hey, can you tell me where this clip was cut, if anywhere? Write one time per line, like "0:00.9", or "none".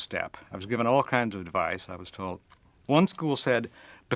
0:01.0

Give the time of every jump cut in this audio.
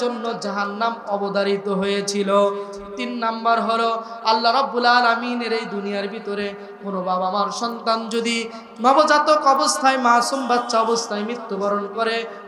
none

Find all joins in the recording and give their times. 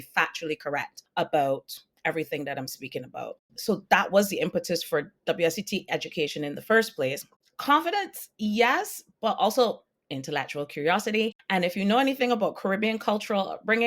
0:07.4

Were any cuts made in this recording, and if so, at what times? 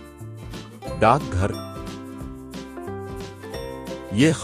0:01.5
0:03.4

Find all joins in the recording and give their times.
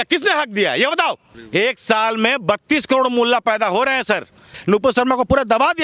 0:01.3
0:04.5

